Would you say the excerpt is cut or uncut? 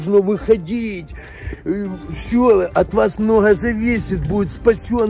uncut